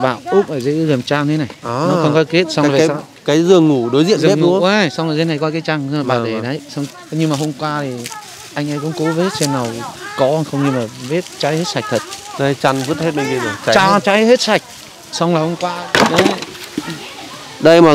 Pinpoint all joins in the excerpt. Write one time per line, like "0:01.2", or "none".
0:15.6